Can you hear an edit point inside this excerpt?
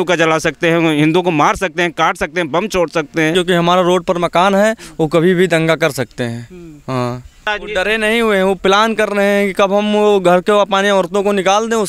yes; 2 cuts; at 3.3 s, 7.5 s

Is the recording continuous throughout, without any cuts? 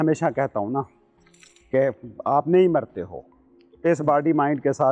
yes; 0 cuts

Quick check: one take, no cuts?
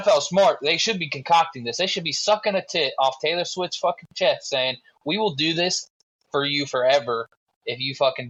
yes; 0 cuts

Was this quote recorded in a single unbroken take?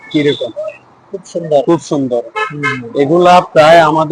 yes; 0 cuts

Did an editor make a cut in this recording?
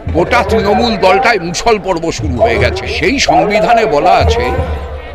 yes; 1 cut; at 2.9 s

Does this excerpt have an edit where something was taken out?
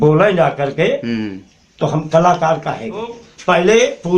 yes; 1 cut; at 3.3 s

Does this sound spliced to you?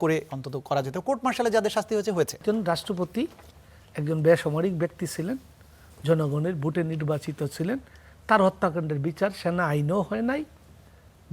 yes; 1 cut; at 2.4 s

